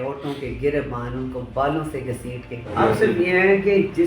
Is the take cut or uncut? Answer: cut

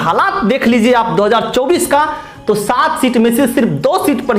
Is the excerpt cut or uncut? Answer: uncut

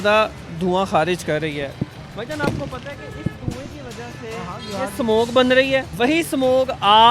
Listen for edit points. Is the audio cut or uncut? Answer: cut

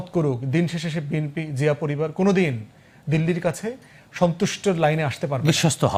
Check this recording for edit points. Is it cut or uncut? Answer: uncut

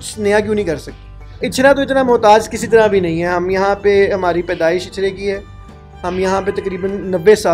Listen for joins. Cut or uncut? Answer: cut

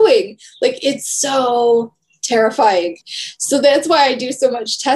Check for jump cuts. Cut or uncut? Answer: cut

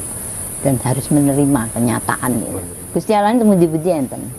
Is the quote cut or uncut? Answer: cut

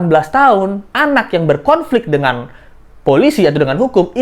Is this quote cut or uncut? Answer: uncut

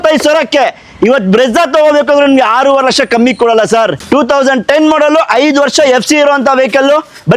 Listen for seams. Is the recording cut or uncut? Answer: cut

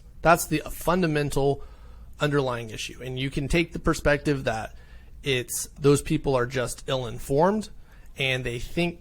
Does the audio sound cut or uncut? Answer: cut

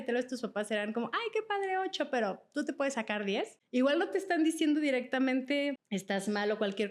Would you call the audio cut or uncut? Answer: cut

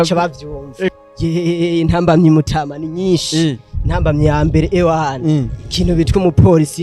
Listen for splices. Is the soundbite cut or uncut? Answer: cut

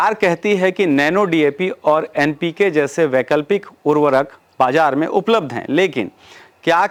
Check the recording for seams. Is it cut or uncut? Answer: uncut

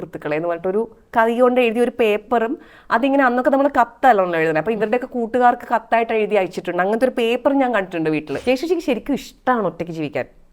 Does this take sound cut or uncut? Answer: cut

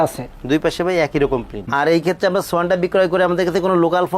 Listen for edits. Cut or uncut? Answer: cut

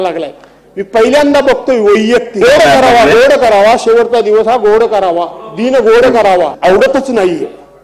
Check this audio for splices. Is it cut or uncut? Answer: cut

